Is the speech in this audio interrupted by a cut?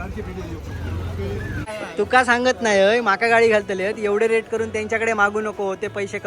yes; 1 cut; at 1.6 s

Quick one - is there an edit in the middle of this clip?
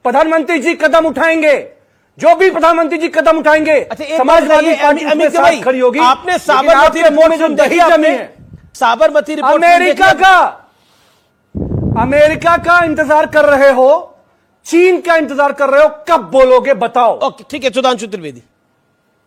no; 0 cuts

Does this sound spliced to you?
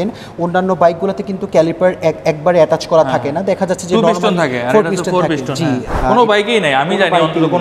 yes; 1 cut; at 5.9 s

